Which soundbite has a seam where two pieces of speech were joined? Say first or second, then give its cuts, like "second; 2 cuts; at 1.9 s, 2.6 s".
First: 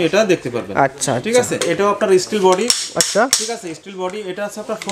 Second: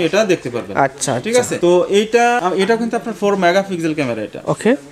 first; 1 cut; at 1.6 s